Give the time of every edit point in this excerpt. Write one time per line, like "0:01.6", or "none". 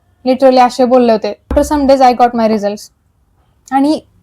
0:01.5